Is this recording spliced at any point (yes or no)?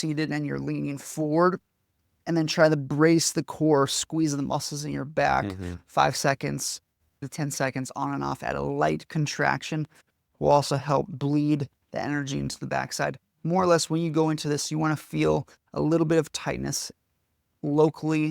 no